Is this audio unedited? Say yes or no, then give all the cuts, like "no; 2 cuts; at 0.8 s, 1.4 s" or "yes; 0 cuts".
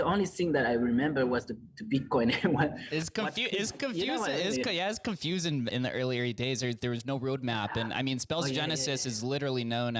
no; 2 cuts; at 2.8 s, 5.7 s